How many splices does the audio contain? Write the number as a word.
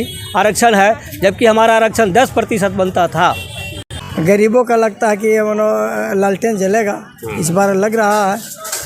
one